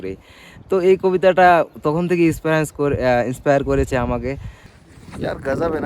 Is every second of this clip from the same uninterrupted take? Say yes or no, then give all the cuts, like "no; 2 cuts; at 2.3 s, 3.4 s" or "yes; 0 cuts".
no; 1 cut; at 4.9 s